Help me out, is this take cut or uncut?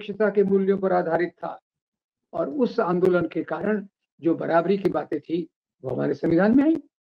uncut